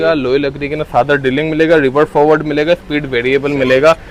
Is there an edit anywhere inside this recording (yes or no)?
no